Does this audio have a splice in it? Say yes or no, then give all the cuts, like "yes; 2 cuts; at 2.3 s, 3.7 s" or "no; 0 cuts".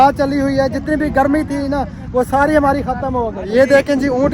yes; 1 cut; at 3.4 s